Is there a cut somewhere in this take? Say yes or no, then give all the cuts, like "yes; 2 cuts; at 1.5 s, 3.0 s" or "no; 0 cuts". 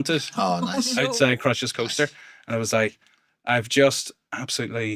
no; 0 cuts